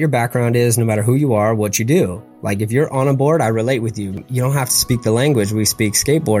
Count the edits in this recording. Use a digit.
1